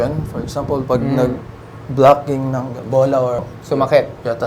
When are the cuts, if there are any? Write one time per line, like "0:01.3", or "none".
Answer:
0:03.4

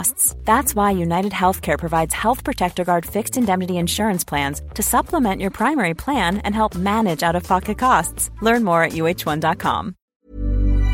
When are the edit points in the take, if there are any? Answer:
0:10.0

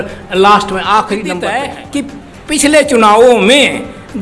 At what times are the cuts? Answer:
0:01.7

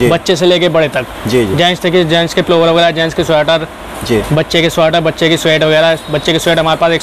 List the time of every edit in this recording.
none

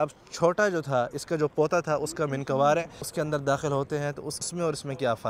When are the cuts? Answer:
0:03.1
0:04.5

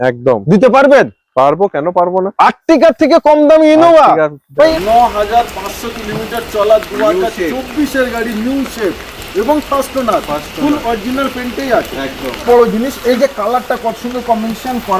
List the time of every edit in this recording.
0:04.8
0:12.4

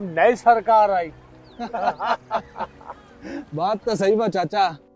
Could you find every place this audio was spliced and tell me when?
none

